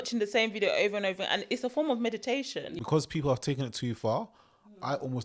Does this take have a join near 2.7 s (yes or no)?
yes